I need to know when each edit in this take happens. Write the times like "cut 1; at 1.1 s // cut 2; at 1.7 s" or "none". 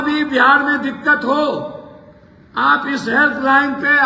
none